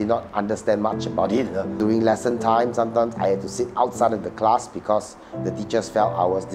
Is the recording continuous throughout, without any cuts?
no; 1 cut; at 1.7 s

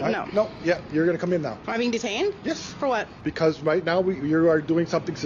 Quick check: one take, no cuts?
no; 2 cuts; at 1.6 s, 3.1 s

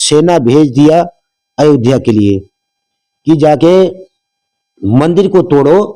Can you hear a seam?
no; 0 cuts

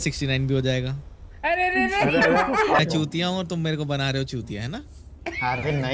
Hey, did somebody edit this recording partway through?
yes; 1 cut; at 2.8 s

